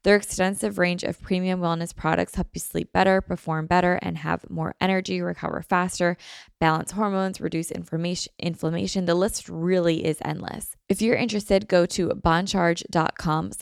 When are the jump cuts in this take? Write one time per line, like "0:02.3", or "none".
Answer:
0:10.7